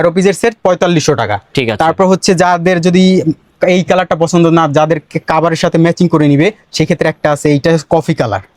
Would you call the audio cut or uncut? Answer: uncut